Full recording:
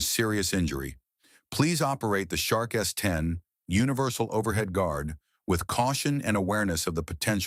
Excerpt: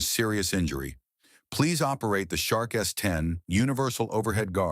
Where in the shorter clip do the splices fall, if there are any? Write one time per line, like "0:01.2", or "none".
0:03.4